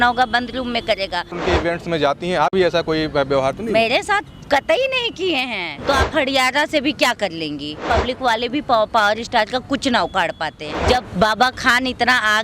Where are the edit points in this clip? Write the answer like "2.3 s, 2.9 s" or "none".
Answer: 1.3 s, 5.7 s, 7.8 s, 10.7 s

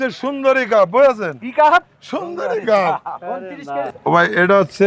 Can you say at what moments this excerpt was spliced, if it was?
3.9 s

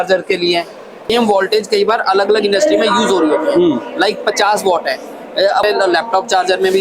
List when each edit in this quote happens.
1.1 s, 5.6 s

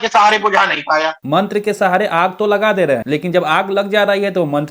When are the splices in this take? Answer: none

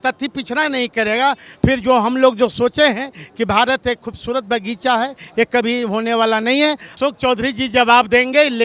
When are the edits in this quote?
6.9 s

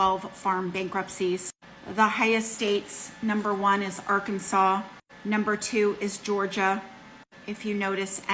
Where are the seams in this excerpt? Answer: none

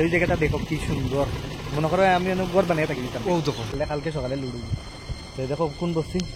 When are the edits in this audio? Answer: 3.7 s

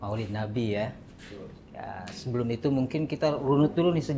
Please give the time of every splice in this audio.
none

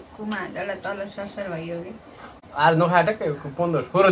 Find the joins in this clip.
2.4 s

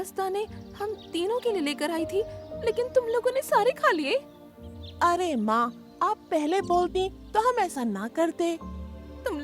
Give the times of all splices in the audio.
none

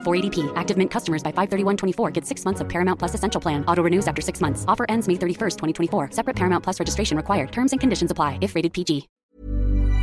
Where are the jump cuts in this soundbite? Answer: 9.1 s

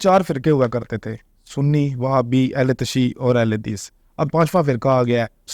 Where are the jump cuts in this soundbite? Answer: 4.3 s

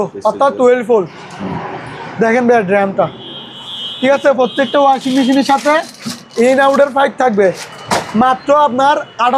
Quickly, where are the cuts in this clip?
none

